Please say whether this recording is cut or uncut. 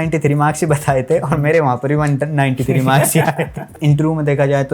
cut